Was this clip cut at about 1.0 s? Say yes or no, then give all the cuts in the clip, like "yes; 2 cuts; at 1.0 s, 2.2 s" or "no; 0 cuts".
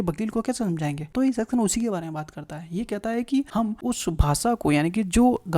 yes; 2 cuts; at 1.0 s, 3.6 s